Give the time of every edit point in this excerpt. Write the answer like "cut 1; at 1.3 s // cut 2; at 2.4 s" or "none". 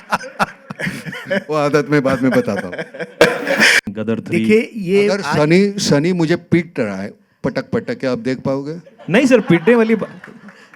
cut 1; at 3.8 s